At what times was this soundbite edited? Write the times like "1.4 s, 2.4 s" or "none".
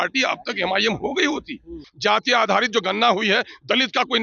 1.8 s